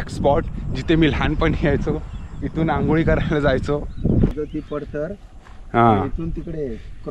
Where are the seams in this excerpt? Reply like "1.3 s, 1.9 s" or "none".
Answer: 4.3 s